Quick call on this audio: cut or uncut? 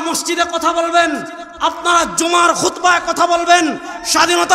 uncut